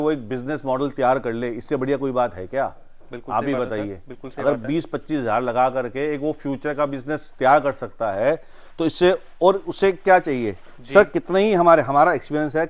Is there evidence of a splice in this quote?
no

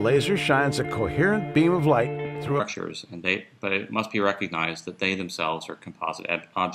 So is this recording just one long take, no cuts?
yes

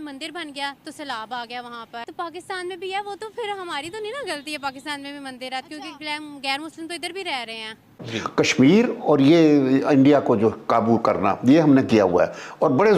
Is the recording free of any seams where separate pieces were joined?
no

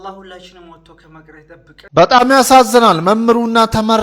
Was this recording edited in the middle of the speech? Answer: yes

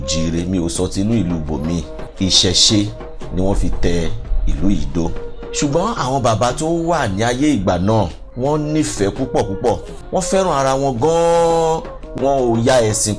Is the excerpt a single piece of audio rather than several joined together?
no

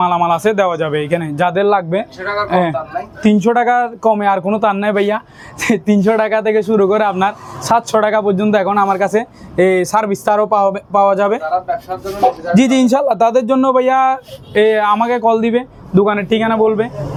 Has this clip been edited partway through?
no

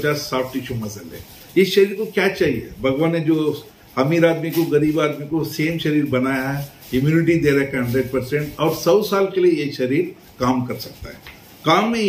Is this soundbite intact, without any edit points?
yes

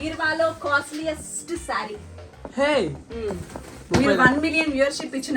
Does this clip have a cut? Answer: no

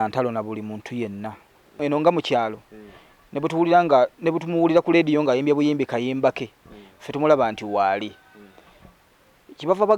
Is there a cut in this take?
yes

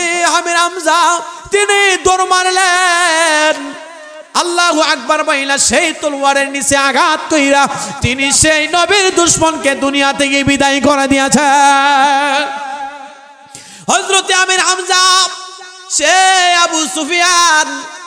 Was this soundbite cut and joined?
no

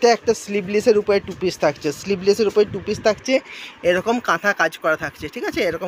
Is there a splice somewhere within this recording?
no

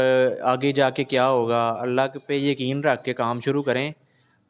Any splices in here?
no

